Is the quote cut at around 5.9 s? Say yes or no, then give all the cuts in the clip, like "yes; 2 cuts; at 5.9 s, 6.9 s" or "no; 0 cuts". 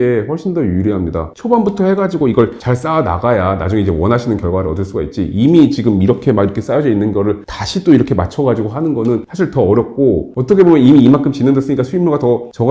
no; 1 cut; at 1.2 s